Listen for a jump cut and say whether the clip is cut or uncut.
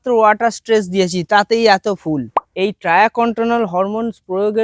cut